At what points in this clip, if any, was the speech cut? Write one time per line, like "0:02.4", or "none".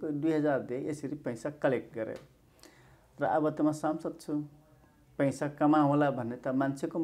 none

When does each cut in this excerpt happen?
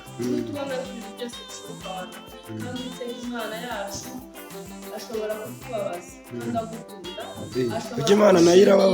0:02.4

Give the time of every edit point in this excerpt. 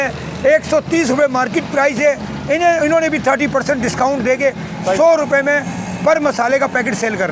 none

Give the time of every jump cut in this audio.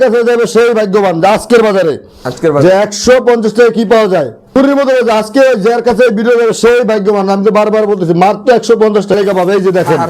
0:04.6
0:09.2

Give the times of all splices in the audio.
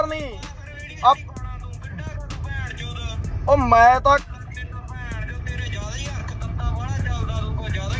0:04.2

